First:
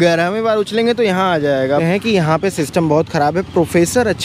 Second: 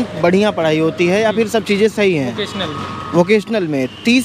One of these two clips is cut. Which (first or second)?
first